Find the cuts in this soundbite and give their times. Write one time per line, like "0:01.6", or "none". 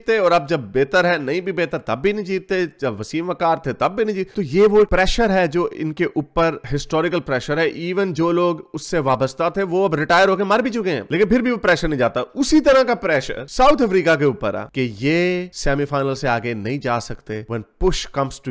none